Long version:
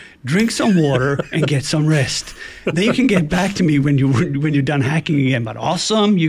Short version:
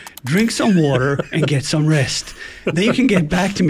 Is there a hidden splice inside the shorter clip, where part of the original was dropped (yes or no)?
no